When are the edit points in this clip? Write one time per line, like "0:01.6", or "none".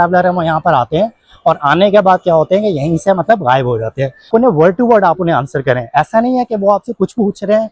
0:04.3